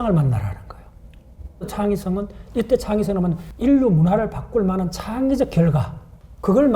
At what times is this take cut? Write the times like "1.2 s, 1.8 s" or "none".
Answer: 1.7 s, 3.5 s